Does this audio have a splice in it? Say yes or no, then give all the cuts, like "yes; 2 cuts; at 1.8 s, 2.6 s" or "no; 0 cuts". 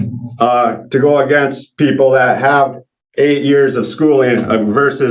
no; 0 cuts